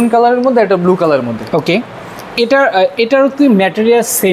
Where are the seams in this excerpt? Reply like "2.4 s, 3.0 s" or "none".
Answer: none